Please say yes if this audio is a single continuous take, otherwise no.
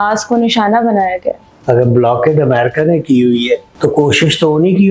no